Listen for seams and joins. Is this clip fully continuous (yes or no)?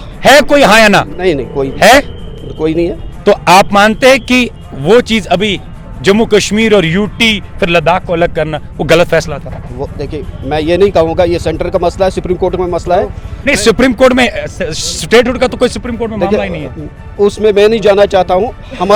yes